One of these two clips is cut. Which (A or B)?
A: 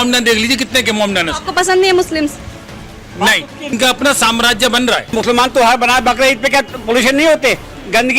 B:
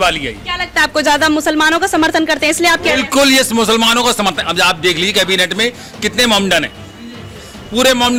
A